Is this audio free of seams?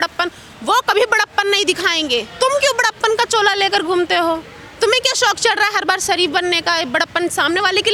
yes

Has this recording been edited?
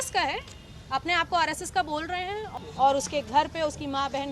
yes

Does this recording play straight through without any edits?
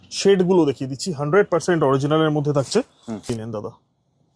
no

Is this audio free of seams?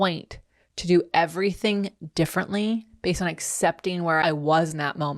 no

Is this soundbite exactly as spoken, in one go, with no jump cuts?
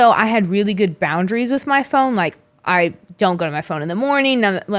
yes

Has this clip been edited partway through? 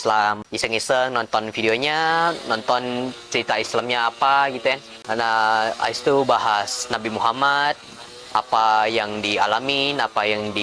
no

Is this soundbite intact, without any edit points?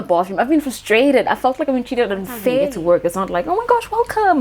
no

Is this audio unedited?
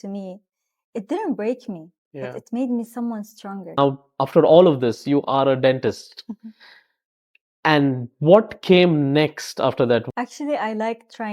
no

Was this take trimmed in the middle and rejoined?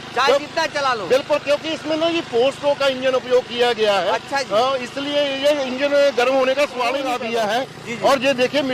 yes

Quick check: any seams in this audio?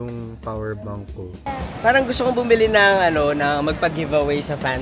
yes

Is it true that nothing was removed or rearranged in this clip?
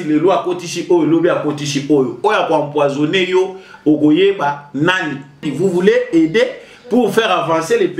no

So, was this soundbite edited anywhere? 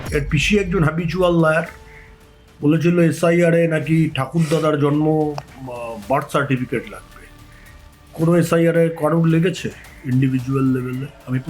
no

